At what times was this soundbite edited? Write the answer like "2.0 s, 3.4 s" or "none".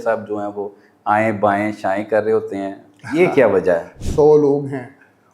4.0 s